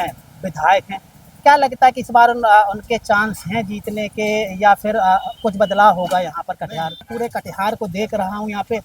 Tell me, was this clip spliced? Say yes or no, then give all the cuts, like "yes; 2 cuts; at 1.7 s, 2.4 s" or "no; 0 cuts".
yes; 1 cut; at 7.1 s